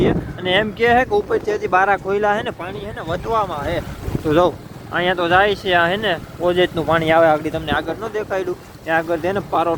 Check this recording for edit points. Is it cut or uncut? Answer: uncut